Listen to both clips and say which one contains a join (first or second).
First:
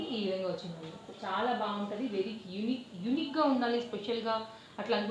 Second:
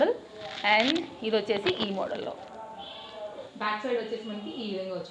second